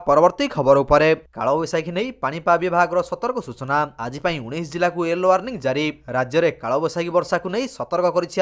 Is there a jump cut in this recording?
yes; 1 cut; at 1.1 s

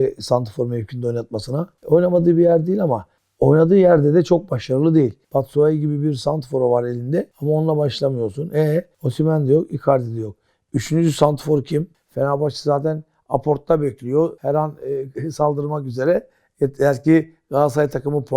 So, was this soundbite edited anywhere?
yes; 4 cuts; at 1.8 s, 5.2 s, 11.9 s, 14.4 s

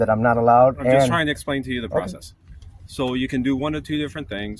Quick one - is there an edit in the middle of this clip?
no; 0 cuts

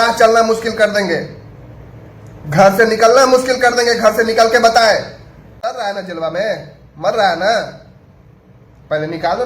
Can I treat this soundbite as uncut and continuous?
no; 1 cut; at 5.4 s

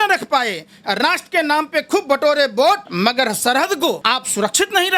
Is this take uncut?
no; 2 cuts; at 2.9 s, 4.0 s

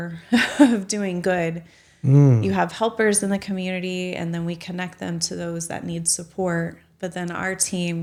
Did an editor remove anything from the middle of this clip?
no; 0 cuts

